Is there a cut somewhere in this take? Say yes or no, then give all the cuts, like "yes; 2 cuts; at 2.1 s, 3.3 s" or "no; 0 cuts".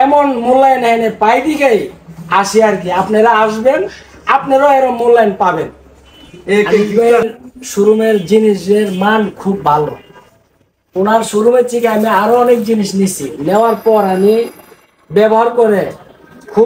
yes; 1 cut; at 6.8 s